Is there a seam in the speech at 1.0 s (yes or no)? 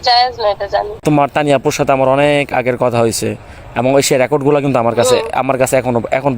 yes